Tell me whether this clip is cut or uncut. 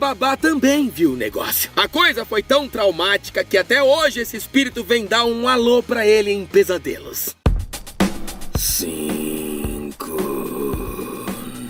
uncut